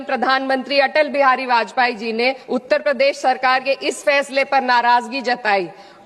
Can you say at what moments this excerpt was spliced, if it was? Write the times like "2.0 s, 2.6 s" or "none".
2.4 s